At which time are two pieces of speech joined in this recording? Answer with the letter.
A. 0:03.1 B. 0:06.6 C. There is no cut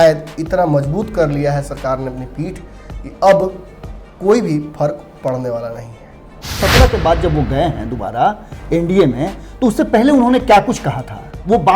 B